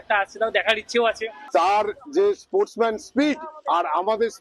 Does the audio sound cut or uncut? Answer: cut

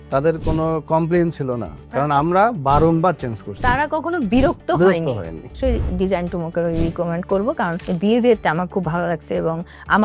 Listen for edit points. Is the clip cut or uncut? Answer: cut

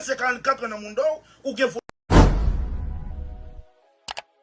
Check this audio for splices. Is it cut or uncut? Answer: cut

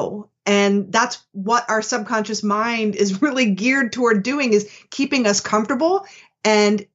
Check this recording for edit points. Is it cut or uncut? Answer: uncut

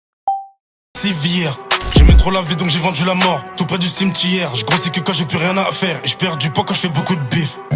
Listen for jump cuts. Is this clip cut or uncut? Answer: cut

